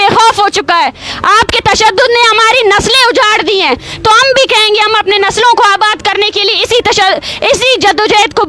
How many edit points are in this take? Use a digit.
0